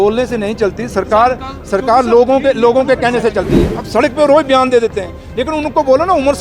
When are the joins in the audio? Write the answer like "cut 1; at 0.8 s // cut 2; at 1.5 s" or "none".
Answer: cut 1; at 3.6 s